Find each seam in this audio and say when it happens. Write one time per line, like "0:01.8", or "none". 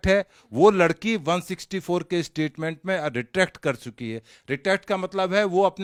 none